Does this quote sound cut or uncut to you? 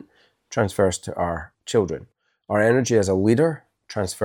cut